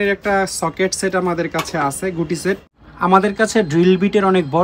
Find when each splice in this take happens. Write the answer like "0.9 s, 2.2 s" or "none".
2.7 s